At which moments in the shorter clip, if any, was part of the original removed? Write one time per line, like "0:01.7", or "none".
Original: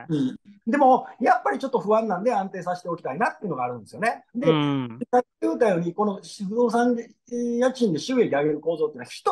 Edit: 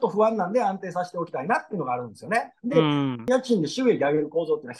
0:03.2